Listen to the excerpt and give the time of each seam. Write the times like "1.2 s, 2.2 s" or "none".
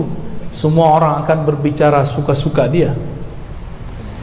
none

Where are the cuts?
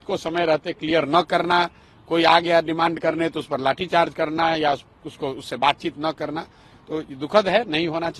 none

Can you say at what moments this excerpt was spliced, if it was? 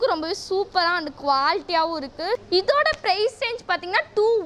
2.4 s

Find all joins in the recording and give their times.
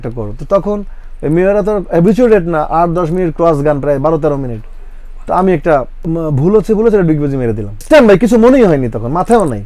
6.0 s, 7.8 s

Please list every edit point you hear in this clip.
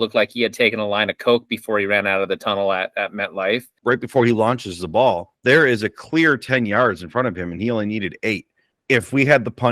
3.7 s, 8.7 s

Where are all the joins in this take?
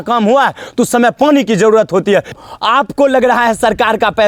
2.3 s

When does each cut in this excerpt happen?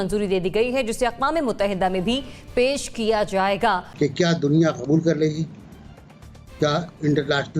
3.9 s

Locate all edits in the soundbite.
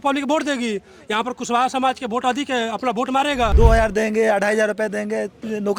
3.5 s

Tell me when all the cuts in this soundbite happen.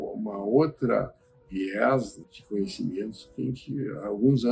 none

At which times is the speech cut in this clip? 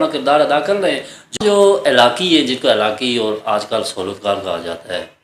1.4 s

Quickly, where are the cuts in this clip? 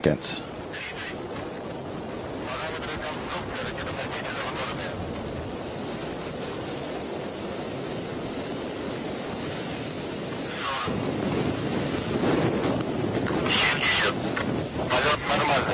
none

